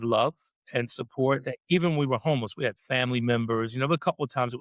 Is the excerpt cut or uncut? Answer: uncut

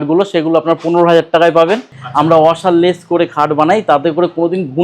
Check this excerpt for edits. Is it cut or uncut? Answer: cut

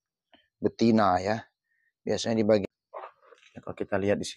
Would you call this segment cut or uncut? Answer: cut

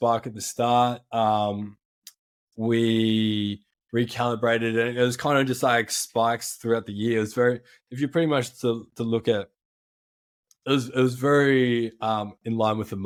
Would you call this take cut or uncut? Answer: uncut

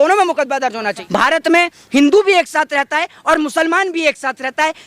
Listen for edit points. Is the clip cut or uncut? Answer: cut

